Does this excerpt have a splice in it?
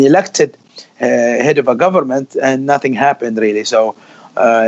no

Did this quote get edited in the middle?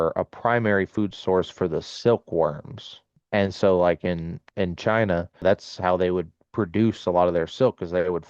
yes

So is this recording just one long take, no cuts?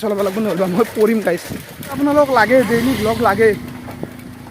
no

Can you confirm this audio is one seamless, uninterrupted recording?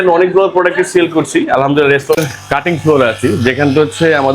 no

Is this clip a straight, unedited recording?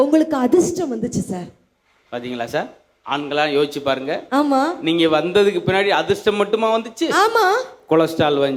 yes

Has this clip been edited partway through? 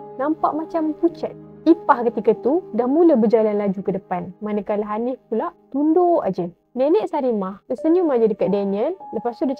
no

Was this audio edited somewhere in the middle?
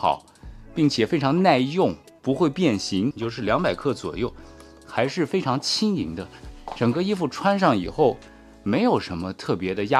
yes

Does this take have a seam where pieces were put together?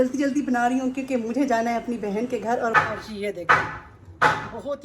yes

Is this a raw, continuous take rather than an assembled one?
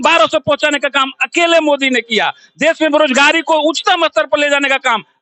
yes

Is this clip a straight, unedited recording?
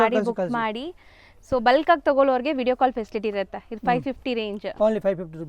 yes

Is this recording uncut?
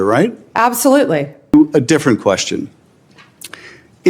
no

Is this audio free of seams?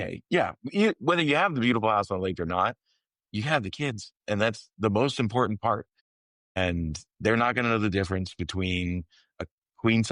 yes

